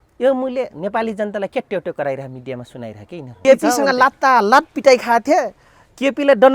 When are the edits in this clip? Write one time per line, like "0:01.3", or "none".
0:03.4